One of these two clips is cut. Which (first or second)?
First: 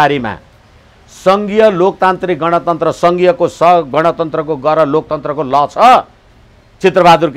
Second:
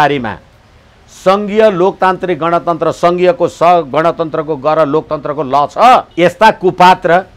second